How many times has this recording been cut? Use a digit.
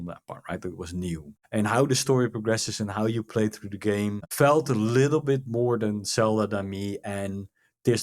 2